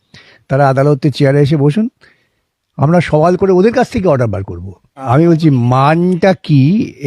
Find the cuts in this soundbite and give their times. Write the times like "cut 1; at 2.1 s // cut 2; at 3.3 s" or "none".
cut 1; at 4.9 s